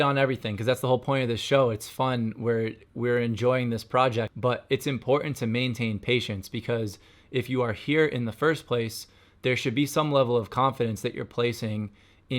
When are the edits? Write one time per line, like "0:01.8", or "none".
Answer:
0:04.3